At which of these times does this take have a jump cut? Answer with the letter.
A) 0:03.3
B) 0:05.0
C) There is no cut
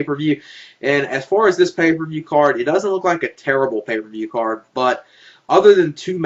C